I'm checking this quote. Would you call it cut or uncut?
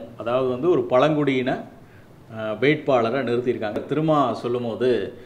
cut